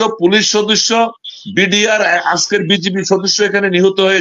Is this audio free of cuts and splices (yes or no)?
yes